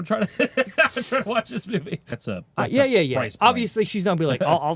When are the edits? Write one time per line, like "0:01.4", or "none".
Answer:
0:02.1